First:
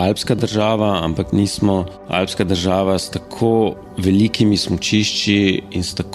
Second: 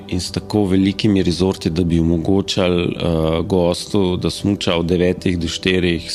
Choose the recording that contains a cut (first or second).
first